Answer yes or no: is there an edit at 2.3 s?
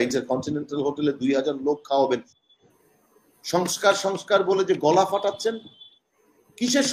yes